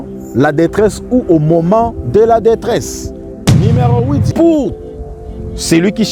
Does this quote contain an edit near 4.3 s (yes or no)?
yes